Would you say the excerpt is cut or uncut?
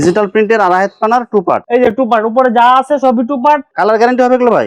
cut